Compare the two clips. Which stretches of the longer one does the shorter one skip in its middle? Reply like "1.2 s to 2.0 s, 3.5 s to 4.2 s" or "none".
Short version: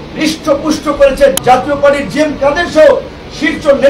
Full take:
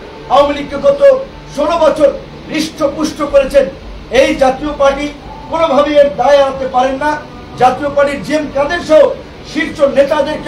3.7 s to 7.5 s